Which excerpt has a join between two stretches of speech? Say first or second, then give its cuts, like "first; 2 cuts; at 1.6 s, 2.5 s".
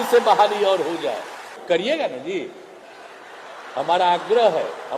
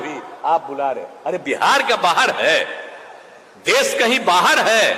first; 1 cut; at 1.6 s